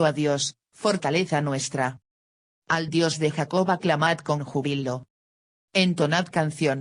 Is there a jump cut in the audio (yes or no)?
yes